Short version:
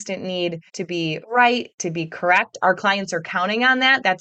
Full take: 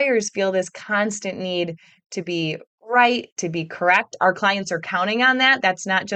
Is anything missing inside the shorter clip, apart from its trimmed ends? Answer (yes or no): yes